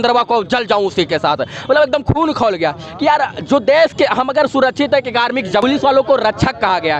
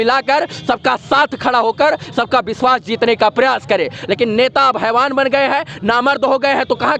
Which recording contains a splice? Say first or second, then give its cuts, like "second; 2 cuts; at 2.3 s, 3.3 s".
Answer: first; 1 cut; at 5.6 s